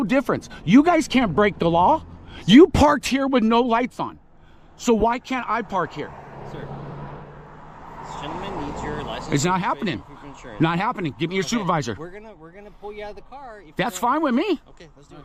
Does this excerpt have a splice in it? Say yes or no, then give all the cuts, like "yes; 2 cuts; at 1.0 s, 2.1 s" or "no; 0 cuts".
no; 0 cuts